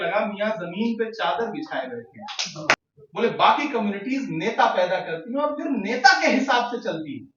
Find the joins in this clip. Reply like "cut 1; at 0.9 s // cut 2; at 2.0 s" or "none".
cut 1; at 2.7 s